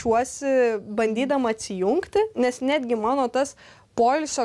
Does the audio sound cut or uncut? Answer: uncut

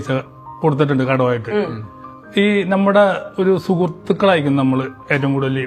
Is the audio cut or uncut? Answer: uncut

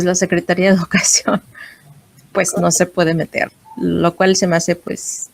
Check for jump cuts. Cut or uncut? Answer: cut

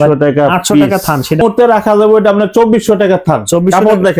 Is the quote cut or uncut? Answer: cut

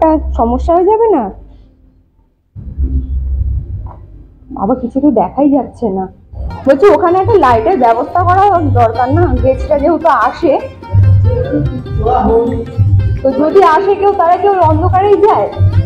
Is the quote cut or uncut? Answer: uncut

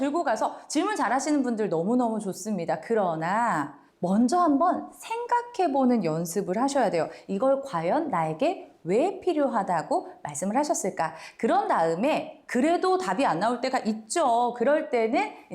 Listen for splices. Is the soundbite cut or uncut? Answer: uncut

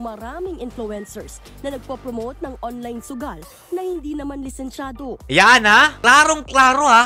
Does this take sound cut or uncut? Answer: uncut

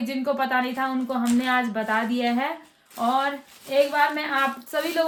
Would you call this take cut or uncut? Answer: uncut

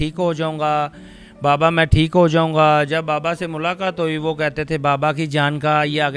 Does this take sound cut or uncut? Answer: uncut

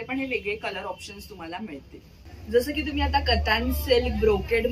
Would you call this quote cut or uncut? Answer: uncut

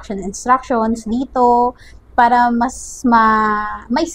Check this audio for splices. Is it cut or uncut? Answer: uncut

